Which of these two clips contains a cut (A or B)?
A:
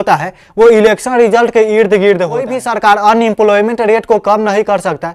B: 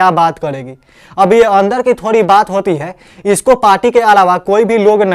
A